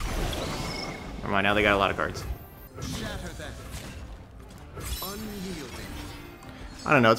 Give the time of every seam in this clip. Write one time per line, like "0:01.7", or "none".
0:02.6
0:04.6